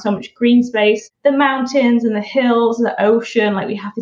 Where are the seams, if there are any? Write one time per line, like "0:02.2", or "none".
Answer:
0:01.1